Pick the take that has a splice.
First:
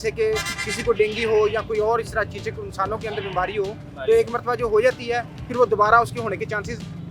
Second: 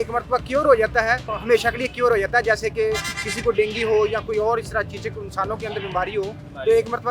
second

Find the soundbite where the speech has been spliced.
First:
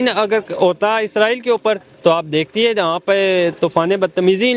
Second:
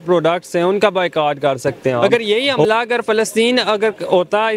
second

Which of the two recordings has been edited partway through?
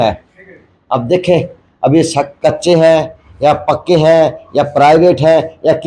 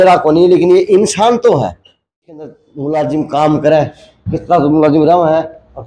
second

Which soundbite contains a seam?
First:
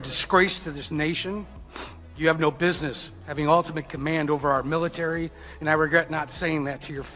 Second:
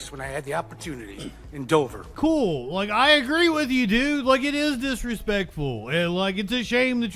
second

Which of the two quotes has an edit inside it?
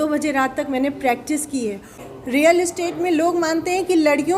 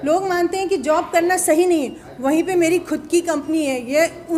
first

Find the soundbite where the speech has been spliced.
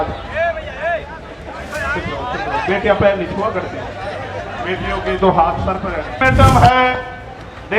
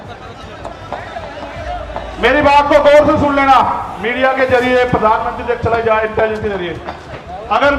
first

